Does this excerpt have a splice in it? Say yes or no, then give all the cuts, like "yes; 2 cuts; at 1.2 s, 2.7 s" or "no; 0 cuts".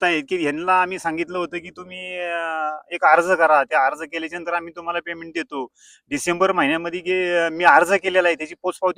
no; 0 cuts